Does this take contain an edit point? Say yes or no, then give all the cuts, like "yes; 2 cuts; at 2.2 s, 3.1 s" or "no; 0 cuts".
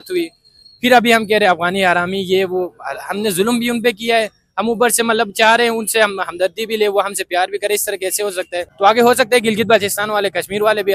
yes; 1 cut; at 8.6 s